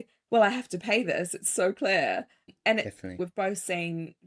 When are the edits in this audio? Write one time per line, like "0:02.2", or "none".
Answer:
0:03.2